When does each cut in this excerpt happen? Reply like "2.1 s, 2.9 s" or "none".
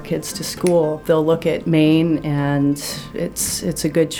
1.5 s